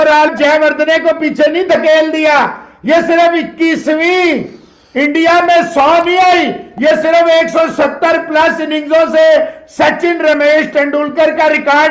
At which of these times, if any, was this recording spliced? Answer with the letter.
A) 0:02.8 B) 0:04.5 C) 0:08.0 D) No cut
D